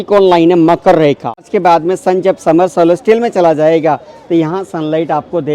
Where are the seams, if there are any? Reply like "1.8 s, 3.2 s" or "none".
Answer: 1.5 s